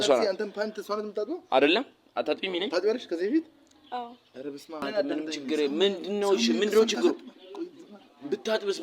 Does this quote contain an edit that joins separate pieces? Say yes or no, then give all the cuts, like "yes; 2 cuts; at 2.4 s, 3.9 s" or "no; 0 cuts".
yes; 1 cut; at 4.8 s